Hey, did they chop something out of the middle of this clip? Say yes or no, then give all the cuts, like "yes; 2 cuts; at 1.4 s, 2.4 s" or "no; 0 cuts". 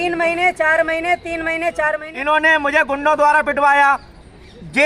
yes; 1 cut; at 2.1 s